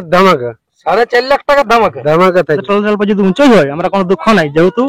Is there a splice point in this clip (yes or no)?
yes